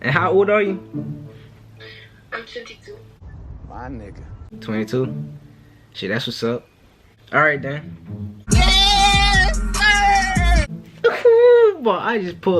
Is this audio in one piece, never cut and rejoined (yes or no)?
yes